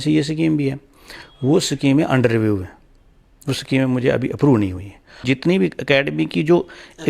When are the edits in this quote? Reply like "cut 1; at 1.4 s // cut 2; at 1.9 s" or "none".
cut 1; at 5.2 s